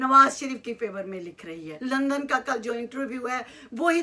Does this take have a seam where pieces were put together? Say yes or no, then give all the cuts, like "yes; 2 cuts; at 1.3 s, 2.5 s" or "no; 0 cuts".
yes; 1 cut; at 1.7 s